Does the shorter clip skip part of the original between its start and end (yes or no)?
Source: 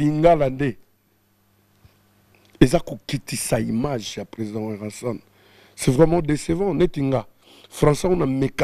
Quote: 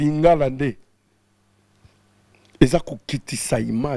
no